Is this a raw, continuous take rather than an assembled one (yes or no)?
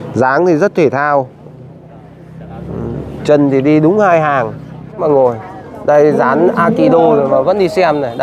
no